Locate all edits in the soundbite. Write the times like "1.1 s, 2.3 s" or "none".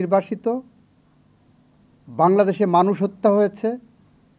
none

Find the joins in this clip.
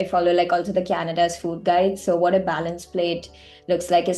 none

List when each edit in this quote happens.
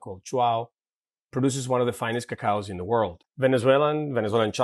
3.2 s

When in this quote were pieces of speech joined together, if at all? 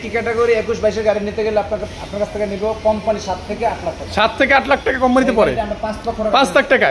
none

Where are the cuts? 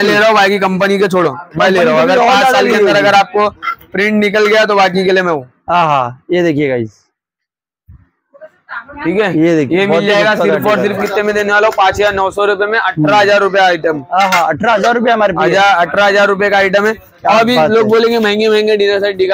none

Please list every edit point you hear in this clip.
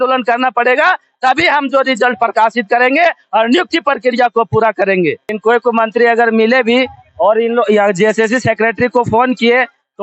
5.3 s

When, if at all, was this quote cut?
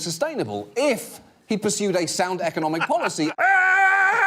3.3 s

